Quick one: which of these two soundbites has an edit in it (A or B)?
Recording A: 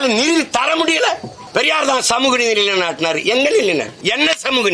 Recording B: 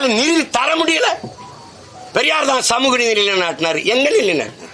A